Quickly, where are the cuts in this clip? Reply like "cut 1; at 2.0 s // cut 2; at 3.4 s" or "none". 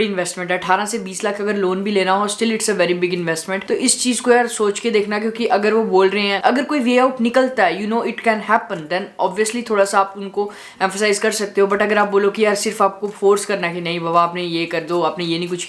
none